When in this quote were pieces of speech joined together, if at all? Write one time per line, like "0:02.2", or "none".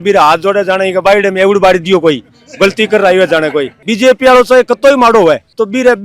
0:03.8